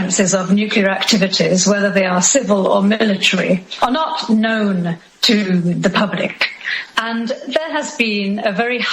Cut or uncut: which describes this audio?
cut